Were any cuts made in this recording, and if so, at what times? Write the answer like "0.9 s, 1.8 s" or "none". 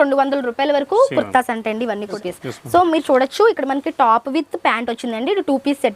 2.1 s